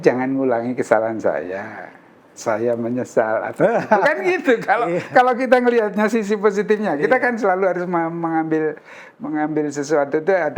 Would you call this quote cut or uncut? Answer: uncut